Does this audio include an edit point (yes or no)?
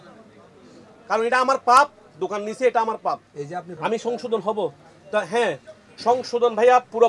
yes